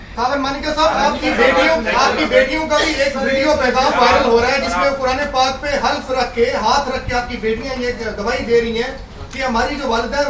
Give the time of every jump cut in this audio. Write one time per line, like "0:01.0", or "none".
none